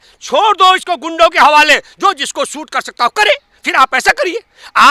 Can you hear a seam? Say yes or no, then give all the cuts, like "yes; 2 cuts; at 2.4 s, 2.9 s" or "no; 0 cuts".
no; 0 cuts